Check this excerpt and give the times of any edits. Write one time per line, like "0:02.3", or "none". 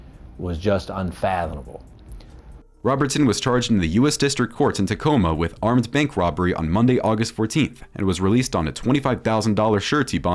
none

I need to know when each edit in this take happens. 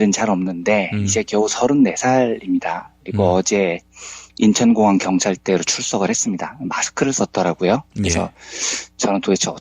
0:07.3

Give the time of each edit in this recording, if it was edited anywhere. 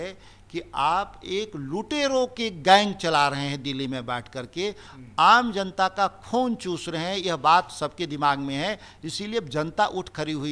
none

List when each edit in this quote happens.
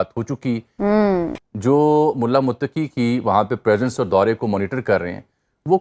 0:01.0

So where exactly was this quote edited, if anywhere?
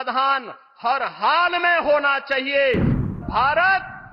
0:03.1

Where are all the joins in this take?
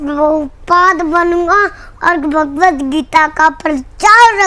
none

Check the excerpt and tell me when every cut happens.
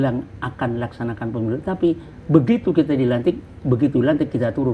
none

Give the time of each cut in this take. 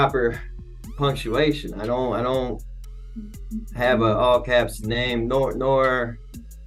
none

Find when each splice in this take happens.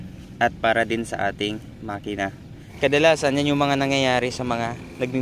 0:02.6

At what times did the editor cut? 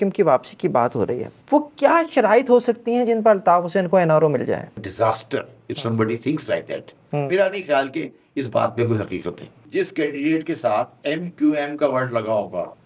0:01.3
0:04.8
0:09.5

